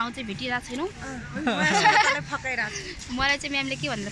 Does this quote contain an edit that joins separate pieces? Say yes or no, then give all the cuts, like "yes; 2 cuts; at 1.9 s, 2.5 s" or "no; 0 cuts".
no; 0 cuts